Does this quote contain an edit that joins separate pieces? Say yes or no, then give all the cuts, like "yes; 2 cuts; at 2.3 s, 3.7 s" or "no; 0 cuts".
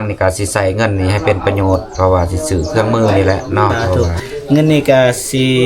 yes; 1 cut; at 4.1 s